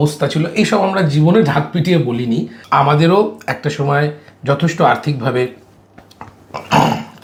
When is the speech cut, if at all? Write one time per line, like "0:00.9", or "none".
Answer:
none